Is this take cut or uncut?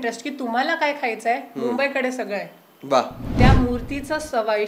cut